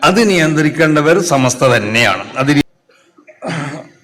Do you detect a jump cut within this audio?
yes; 1 cut; at 2.6 s

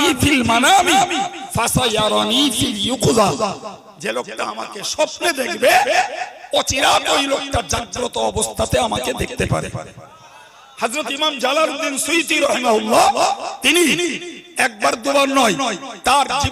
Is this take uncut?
yes; 0 cuts

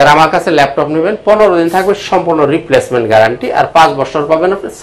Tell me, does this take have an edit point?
no; 0 cuts

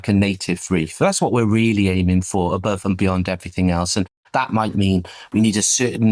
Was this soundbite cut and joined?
no; 0 cuts

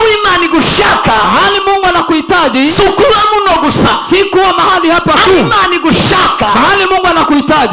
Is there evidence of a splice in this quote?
no; 0 cuts

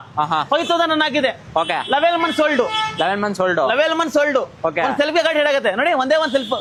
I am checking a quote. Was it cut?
no; 0 cuts

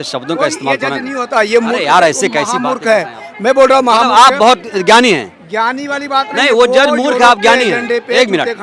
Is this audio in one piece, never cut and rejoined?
yes; 0 cuts

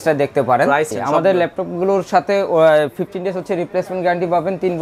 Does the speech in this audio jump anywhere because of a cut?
yes; 1 cut; at 0.9 s

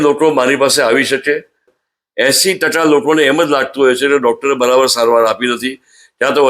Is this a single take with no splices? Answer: no; 1 cut; at 1.7 s

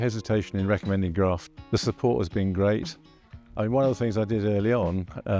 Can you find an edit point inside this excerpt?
yes; 1 cut; at 1.5 s

